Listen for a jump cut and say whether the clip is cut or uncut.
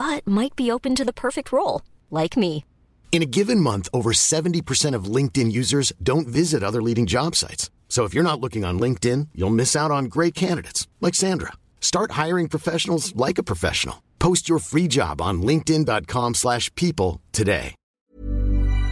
cut